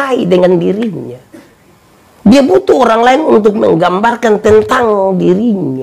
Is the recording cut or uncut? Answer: uncut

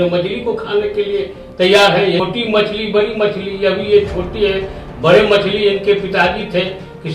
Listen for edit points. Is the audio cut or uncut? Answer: cut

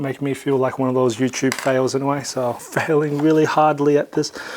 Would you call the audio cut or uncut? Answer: cut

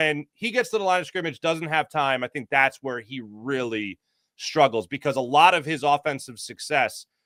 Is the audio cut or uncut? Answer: uncut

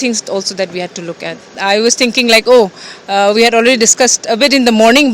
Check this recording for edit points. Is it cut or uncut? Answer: cut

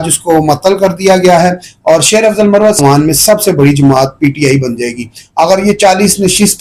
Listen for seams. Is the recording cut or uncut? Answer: cut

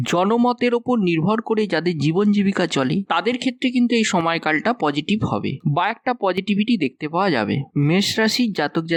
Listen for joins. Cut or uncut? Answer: uncut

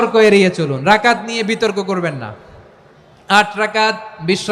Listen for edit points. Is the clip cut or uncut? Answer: uncut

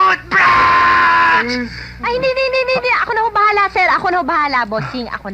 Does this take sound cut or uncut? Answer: cut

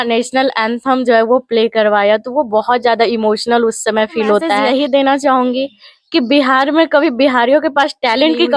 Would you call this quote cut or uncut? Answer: cut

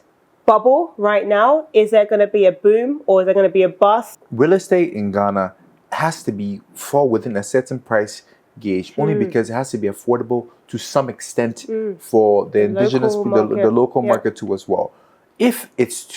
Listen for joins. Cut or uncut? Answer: cut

